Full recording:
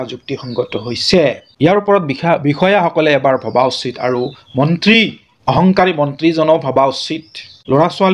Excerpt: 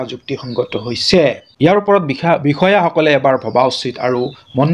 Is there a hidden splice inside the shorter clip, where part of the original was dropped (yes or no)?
no